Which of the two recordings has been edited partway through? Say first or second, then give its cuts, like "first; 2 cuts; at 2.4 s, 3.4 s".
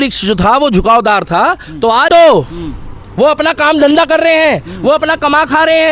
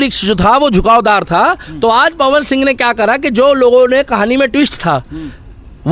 first; 1 cut; at 2.1 s